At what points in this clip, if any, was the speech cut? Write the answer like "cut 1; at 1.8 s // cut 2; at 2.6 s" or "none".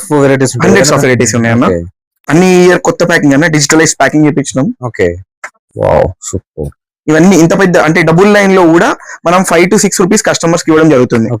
none